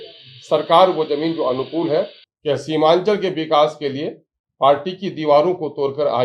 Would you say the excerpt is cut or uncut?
cut